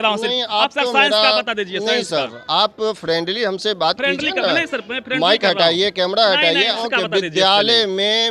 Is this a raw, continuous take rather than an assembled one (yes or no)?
no